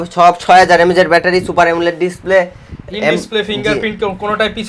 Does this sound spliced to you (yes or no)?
no